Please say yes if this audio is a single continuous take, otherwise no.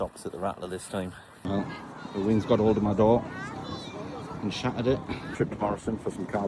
no